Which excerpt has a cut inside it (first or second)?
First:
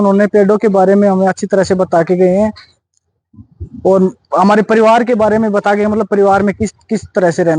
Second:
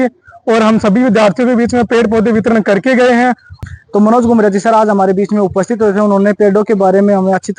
second